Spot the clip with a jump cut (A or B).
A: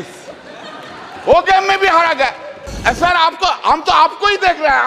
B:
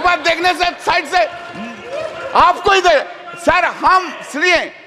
A